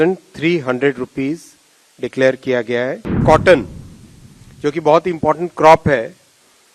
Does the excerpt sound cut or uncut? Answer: cut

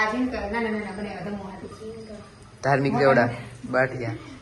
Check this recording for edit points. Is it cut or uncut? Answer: uncut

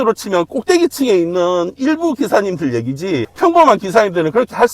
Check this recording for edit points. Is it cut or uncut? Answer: uncut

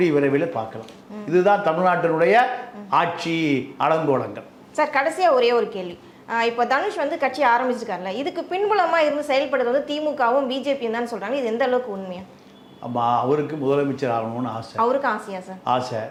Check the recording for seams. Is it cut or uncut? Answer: uncut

